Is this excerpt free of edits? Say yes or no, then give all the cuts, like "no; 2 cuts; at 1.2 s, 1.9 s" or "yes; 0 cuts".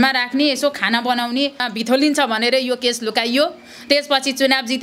no; 1 cut; at 1.7 s